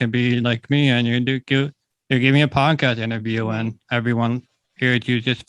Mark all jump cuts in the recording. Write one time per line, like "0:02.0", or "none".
none